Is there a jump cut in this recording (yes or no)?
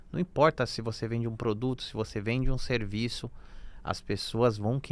no